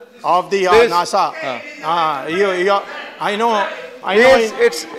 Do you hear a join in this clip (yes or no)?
no